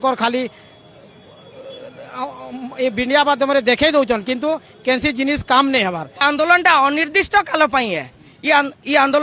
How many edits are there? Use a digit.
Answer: 1